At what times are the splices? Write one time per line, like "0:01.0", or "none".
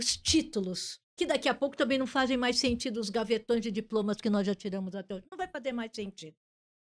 none

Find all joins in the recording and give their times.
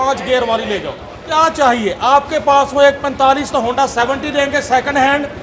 0:01.1

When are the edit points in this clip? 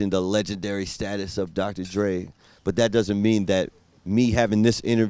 none

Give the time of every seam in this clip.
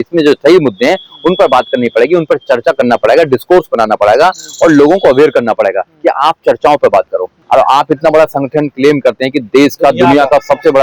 0:07.3

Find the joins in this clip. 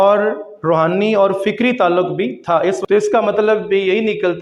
0:02.8

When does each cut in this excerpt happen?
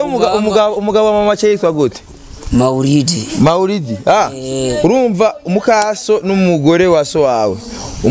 none

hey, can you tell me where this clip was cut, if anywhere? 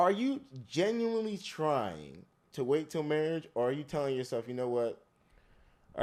none

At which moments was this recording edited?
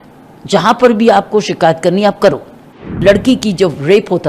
0:02.8

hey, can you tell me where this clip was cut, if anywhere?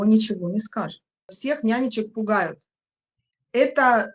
0:01.3

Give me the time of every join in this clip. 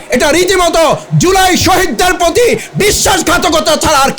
none

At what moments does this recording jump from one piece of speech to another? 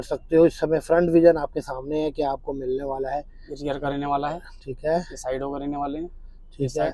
none

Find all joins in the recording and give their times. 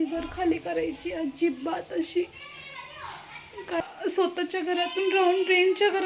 0:03.8

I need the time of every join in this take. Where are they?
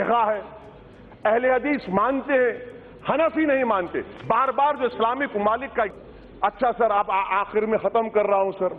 0:05.9

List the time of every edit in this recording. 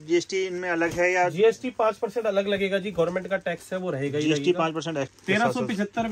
0:05.1

